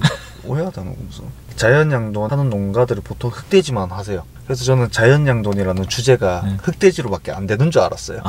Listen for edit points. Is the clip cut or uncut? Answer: cut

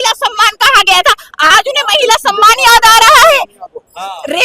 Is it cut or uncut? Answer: cut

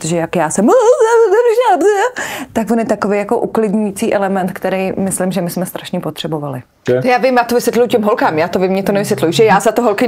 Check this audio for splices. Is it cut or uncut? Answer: cut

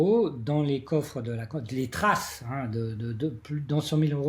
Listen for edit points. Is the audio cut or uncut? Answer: uncut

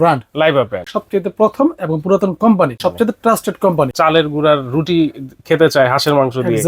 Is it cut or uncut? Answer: cut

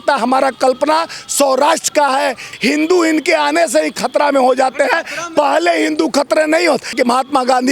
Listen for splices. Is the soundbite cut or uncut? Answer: cut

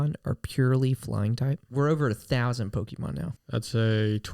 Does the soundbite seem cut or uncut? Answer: cut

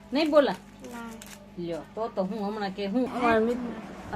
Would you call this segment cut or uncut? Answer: cut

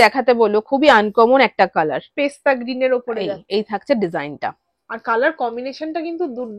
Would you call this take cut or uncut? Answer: uncut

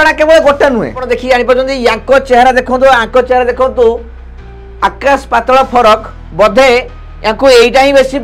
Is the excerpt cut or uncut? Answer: cut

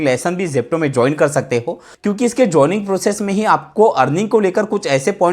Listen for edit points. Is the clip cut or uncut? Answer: cut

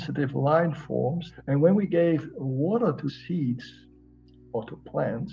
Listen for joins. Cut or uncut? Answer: cut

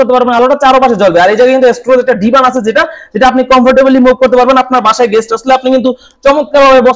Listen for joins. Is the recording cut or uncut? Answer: uncut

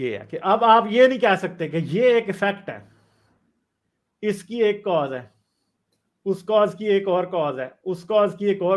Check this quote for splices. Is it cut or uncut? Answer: uncut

